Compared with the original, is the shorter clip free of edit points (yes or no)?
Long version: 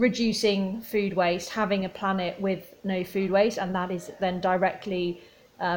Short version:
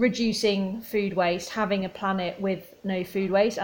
yes